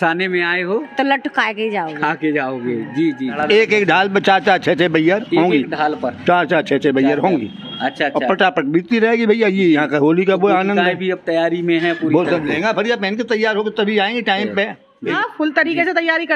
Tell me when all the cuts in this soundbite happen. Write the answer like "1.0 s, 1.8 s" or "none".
3.3 s, 15.0 s